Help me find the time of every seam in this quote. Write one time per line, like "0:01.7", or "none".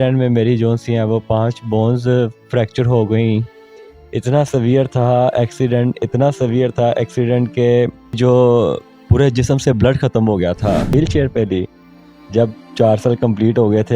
0:08.2
0:10.9